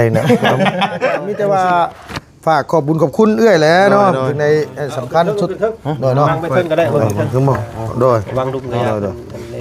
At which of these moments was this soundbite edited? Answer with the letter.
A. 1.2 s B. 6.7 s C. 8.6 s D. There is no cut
A